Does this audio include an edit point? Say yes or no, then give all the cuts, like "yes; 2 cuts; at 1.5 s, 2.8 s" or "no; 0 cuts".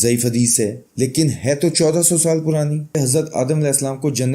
yes; 1 cut; at 2.9 s